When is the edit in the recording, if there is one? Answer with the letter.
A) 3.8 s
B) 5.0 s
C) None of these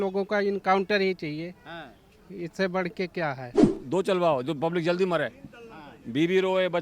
A